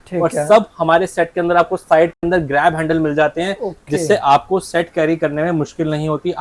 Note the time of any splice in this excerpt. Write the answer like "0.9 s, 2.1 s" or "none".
none